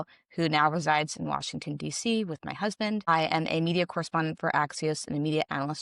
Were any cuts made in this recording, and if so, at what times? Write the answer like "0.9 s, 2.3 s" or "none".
3.1 s